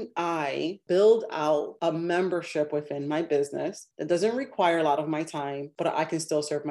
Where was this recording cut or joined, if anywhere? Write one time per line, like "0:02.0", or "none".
0:00.8
0:01.7
0:03.9
0:05.7